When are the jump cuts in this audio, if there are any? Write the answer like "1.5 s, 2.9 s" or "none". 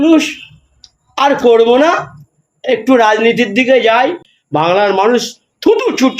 4.3 s